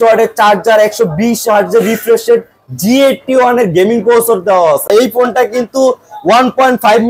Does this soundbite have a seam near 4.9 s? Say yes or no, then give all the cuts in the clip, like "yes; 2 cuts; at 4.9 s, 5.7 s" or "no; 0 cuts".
yes; 1 cut; at 4.9 s